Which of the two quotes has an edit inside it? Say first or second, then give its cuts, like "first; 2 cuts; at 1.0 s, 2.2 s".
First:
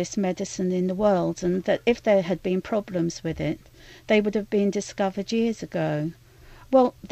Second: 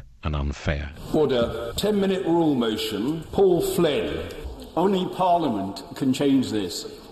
second; 3 cuts; at 0.9 s, 1.7 s, 3.2 s